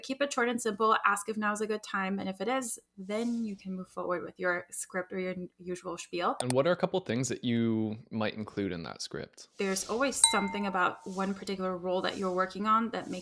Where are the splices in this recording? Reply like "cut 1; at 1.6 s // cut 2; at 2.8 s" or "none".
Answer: cut 1; at 6.4 s // cut 2; at 9.4 s